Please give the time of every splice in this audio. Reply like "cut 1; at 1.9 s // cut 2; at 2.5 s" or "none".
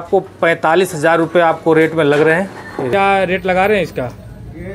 cut 1; at 2.9 s